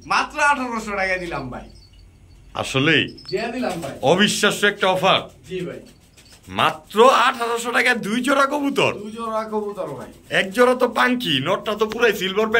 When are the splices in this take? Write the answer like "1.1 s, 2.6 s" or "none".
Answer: none